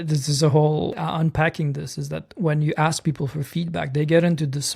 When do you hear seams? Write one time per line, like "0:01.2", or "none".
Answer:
0:01.0